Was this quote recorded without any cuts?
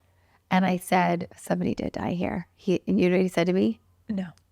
no; 1 cut; at 1.3 s

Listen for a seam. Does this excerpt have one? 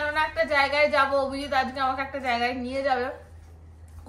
no; 0 cuts

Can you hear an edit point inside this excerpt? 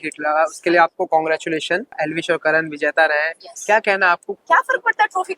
yes; 2 cuts; at 2.0 s, 4.3 s

